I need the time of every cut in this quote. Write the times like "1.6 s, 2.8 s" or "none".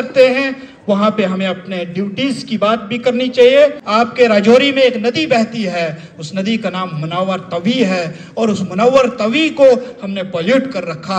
3.8 s